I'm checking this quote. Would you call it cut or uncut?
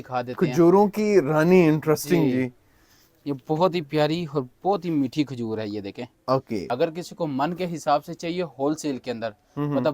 cut